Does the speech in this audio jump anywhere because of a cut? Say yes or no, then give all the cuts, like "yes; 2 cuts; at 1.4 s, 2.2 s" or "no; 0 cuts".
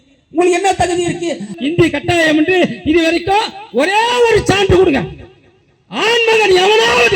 yes; 1 cut; at 1.5 s